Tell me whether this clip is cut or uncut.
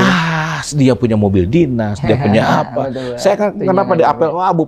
uncut